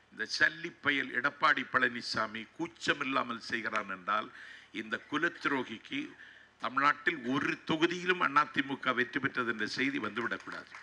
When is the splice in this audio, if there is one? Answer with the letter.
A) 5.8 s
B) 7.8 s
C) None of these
C